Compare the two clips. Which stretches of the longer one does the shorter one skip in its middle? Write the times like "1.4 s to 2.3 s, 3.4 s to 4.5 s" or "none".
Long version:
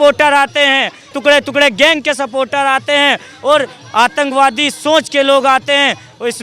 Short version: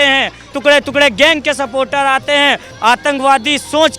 3.3 s to 3.8 s